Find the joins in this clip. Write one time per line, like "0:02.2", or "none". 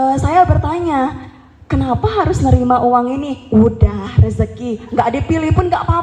none